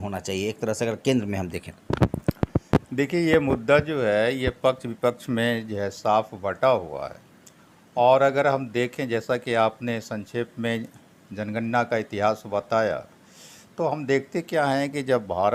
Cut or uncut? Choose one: uncut